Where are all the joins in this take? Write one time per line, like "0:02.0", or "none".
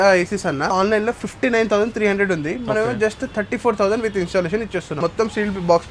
0:00.7
0:05.0